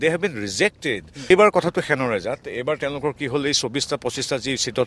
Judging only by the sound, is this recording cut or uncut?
cut